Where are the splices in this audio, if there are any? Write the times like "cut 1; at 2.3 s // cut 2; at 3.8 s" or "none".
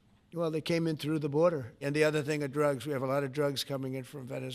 cut 1; at 1.8 s